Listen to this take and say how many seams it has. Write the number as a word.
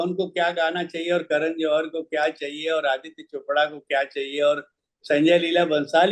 zero